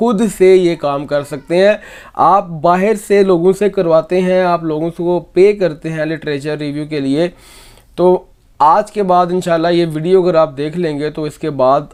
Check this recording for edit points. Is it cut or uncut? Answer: uncut